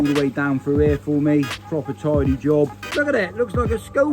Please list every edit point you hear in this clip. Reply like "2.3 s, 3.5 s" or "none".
2.8 s